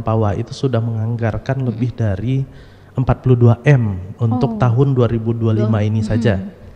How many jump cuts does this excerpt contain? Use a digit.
0